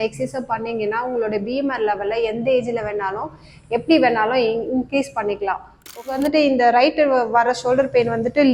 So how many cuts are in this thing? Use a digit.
1